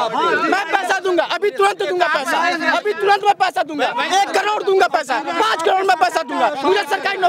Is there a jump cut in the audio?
no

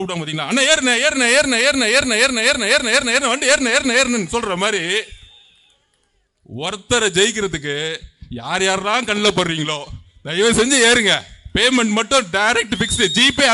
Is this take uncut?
yes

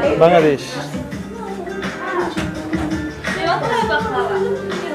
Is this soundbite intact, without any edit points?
yes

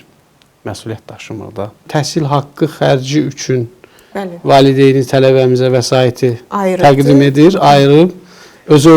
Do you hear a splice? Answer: yes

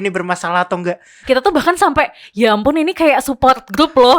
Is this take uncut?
no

